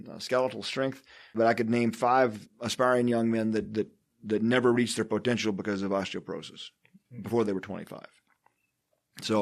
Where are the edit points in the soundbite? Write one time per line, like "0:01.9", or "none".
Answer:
0:01.4
0:02.5